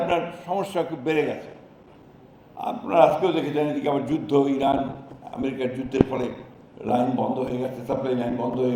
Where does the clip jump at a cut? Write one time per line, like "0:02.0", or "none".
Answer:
none